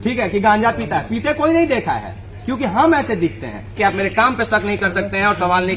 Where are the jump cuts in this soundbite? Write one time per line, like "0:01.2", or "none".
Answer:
0:03.7